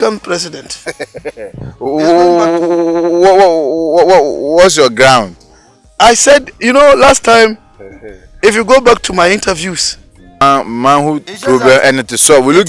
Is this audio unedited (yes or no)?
no